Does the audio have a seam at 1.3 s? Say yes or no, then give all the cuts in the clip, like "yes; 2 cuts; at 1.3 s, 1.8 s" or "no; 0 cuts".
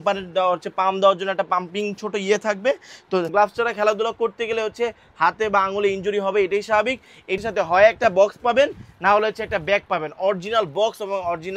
no; 2 cuts; at 3.3 s, 7.4 s